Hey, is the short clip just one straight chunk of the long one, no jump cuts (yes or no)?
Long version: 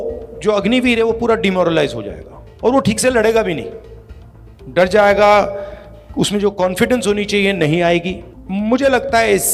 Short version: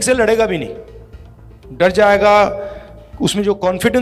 yes